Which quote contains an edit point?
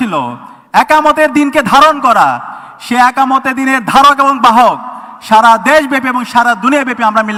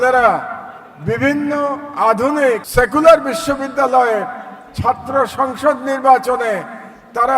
second; 1 cut; at 2.7 s

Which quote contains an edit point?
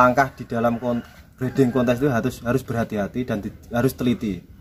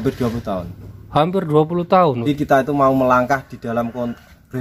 second; 1 cut; at 2.2 s

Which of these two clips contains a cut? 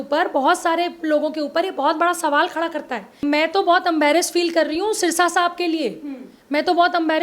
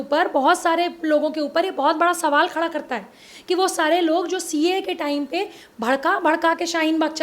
first; 1 cut; at 3.2 s

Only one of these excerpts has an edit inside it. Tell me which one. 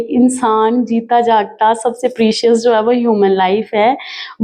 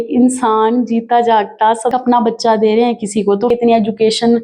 second; 2 cuts; at 1.9 s, 3.5 s

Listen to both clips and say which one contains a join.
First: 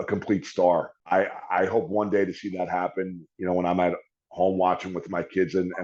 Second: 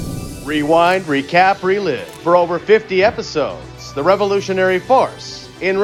first; 1 cut; at 0.9 s

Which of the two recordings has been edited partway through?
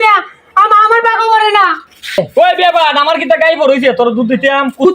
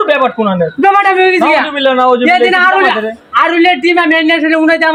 first; 1 cut; at 2.2 s

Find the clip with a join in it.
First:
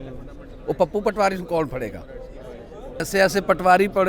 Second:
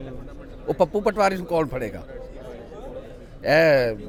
first; 1 cut; at 3.1 s

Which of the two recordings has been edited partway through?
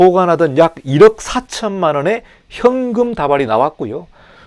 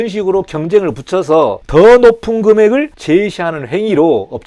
second; 2 cuts; at 1.6 s, 3.0 s

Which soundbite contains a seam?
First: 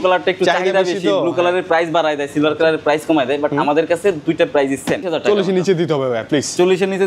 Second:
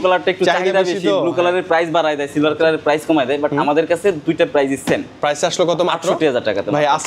first; 1 cut; at 5.1 s

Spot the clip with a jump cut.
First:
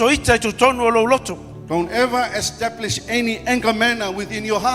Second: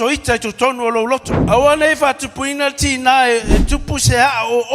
second; 1 cut; at 1.3 s

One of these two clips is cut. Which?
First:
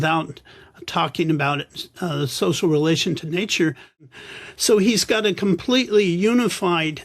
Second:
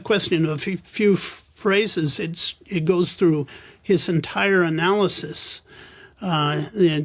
first; 1 cut; at 4.1 s

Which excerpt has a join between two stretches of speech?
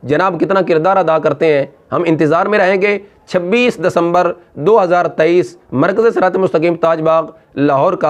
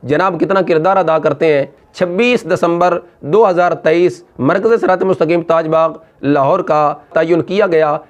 second; 2 cuts; at 1.8 s, 7.1 s

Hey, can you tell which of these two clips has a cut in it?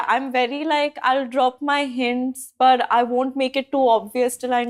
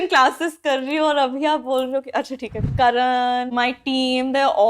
second; 2 cuts; at 2.6 s, 3.5 s

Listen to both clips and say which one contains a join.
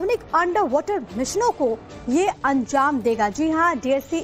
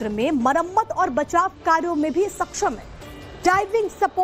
second; 1 cut; at 2.3 s

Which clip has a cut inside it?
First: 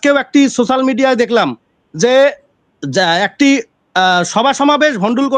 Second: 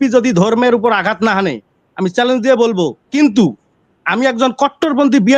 second; 1 cut; at 3.1 s

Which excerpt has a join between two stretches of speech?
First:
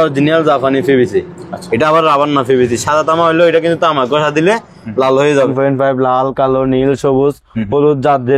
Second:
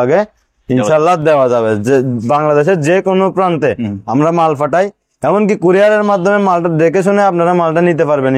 first; 1 cut; at 5.5 s

